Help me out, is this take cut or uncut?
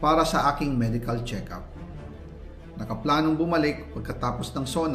uncut